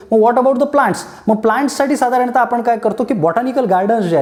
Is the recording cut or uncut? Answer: uncut